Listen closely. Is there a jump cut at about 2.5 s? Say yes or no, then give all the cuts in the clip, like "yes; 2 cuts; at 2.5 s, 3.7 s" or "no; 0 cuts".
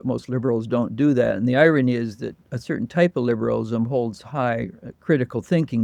no; 0 cuts